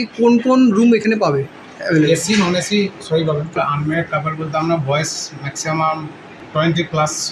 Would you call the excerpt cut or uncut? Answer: cut